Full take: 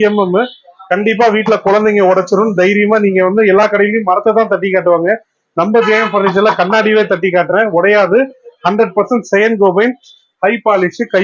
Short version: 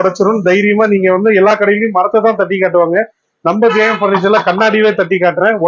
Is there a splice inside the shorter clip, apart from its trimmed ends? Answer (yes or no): no